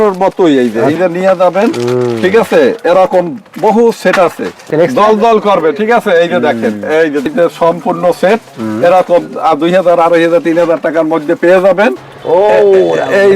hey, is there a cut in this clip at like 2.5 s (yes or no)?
no